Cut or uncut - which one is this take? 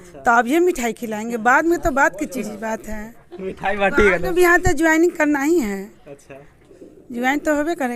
uncut